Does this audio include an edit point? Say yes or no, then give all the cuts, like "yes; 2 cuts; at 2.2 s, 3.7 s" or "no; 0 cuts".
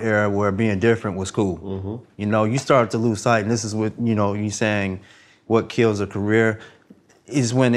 no; 0 cuts